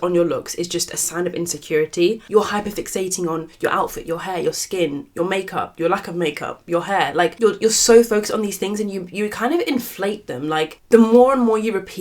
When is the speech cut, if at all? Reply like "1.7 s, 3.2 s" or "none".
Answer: 2.2 s, 7.4 s, 10.8 s